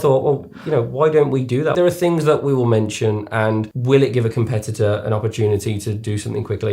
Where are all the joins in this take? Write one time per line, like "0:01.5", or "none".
0:01.7
0:03.7

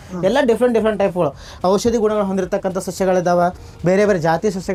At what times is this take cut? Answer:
none

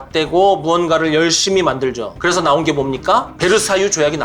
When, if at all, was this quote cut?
0:03.3

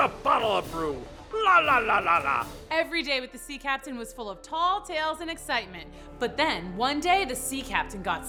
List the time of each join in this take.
none

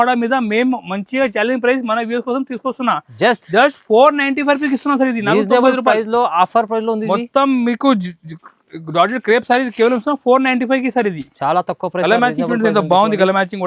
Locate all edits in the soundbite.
none

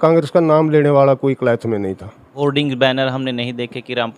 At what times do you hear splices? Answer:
0:02.2

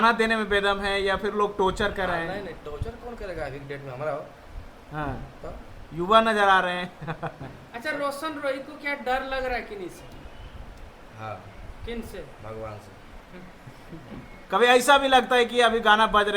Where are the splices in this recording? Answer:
none

